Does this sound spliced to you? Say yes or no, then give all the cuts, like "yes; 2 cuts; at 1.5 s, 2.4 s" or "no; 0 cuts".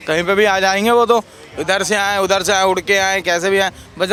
no; 0 cuts